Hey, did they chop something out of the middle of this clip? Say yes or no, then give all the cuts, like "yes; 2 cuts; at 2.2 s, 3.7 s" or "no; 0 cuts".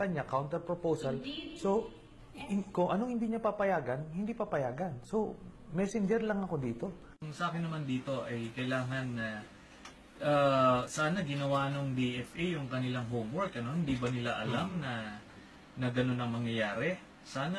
no; 0 cuts